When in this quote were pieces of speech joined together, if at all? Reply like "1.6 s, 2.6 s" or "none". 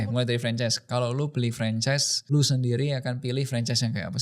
2.1 s